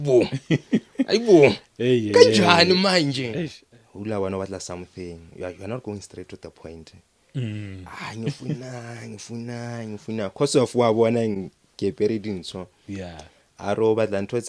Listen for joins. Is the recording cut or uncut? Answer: cut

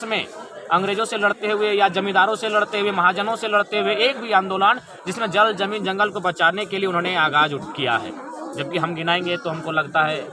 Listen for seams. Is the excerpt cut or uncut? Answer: uncut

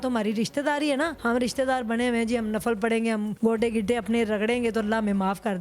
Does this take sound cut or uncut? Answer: cut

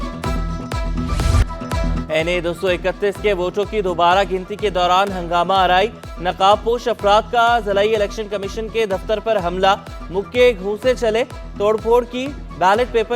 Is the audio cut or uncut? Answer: cut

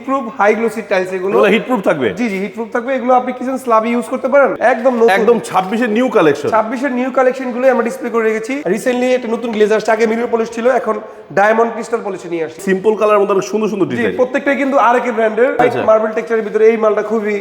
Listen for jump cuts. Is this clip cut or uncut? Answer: cut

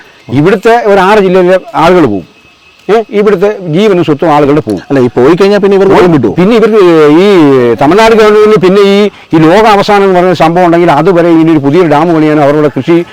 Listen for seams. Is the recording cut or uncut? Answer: uncut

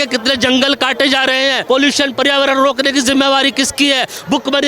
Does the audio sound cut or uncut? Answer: cut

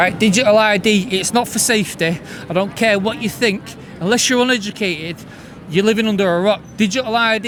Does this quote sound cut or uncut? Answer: uncut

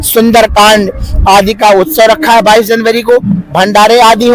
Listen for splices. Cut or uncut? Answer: uncut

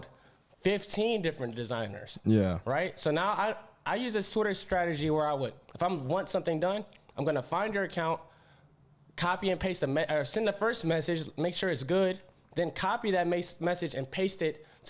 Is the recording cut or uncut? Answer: uncut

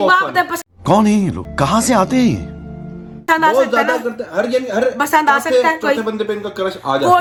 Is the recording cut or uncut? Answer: uncut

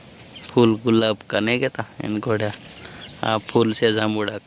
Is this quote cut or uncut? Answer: uncut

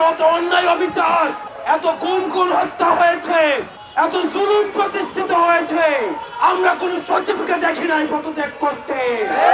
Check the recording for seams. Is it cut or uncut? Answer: cut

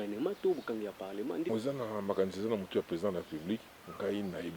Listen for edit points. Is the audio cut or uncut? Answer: cut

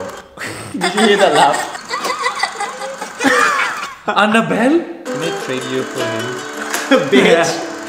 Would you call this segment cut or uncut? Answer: cut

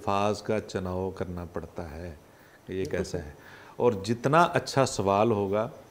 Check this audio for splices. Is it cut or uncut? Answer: uncut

